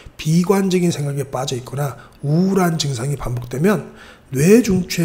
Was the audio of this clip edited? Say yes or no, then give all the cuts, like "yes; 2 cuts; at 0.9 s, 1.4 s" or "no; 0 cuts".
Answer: no; 0 cuts